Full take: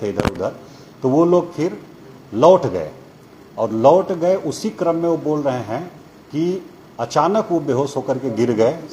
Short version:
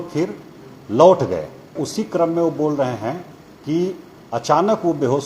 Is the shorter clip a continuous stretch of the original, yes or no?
no